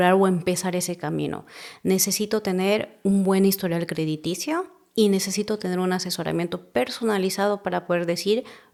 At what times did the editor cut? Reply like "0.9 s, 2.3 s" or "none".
none